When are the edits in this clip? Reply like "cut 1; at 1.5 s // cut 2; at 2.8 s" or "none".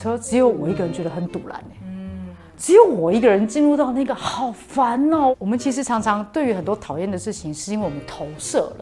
cut 1; at 5.3 s